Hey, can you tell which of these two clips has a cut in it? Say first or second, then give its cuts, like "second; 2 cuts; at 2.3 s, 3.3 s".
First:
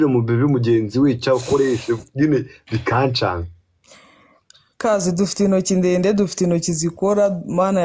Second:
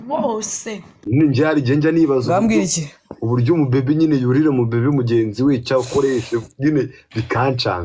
second; 1 cut; at 1.1 s